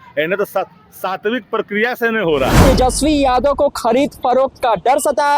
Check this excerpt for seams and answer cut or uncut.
cut